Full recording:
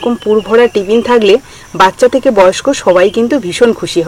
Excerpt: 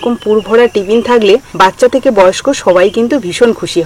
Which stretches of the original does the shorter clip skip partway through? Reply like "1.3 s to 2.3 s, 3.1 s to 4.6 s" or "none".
1.5 s to 1.7 s